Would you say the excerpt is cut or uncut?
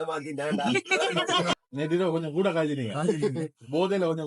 cut